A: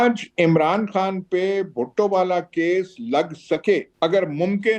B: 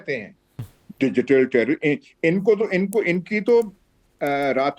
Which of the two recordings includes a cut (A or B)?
A